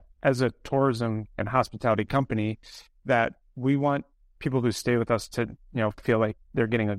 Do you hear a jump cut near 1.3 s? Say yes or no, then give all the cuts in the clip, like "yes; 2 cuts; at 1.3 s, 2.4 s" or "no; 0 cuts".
yes; 1 cut; at 1.3 s